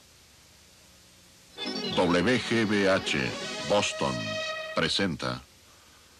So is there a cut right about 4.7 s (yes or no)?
no